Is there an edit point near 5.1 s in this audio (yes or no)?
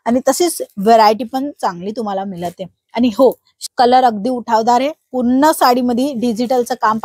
no